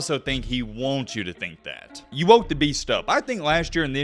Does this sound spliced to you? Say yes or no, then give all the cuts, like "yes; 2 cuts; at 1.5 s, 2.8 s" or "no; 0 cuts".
yes; 1 cut; at 2.0 s